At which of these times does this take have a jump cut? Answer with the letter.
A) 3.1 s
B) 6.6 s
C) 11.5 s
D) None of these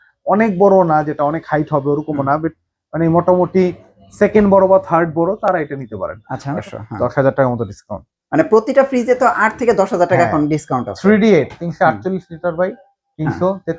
B